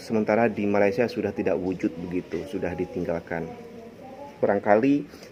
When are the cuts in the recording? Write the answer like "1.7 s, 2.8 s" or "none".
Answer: none